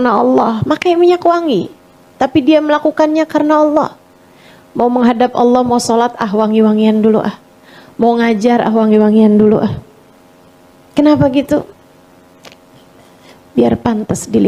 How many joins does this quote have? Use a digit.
0